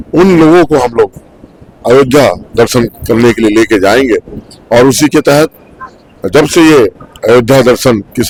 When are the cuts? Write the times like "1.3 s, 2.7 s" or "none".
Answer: none

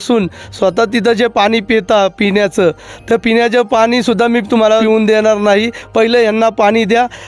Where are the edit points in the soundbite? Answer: 4.8 s

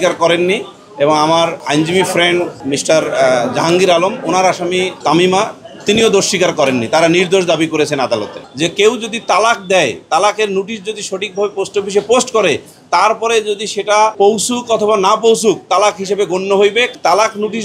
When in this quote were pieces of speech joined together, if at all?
1.6 s, 2.6 s, 4.9 s, 8.4 s, 14.1 s, 16.9 s

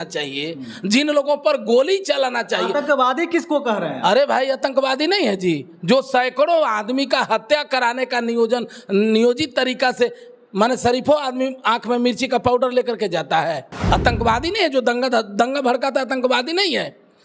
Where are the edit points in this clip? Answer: 13.7 s

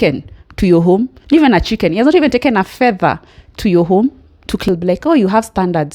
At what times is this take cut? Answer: 4.6 s

